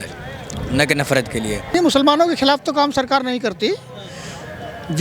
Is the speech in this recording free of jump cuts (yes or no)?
no